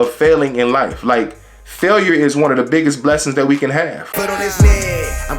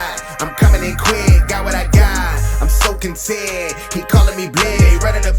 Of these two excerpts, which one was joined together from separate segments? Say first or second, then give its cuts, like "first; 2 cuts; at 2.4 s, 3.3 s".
first; 1 cut; at 4.0 s